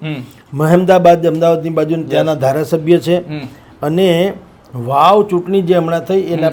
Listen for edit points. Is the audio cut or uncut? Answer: uncut